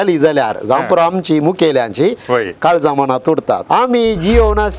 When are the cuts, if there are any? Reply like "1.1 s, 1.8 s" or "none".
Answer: 3.6 s